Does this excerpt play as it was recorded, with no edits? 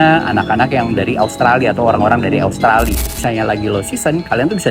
no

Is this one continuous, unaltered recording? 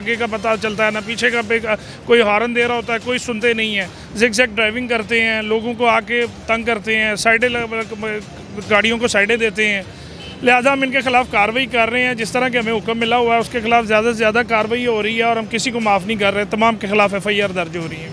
yes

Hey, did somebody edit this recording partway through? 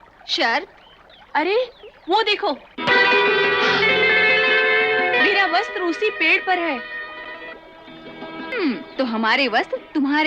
yes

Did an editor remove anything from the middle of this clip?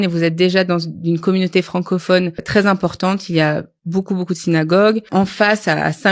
yes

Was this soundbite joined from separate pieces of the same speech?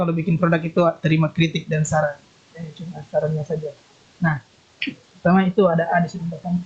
no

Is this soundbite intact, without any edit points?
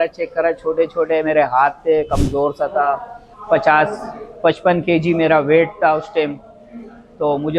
yes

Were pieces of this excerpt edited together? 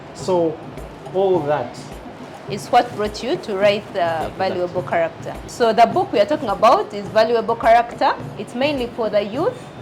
yes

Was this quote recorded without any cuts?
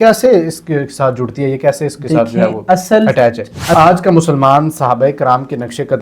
no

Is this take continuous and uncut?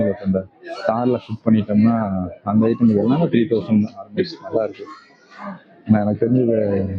yes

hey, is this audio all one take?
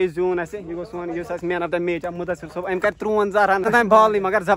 no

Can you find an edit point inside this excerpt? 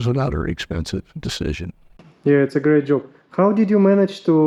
no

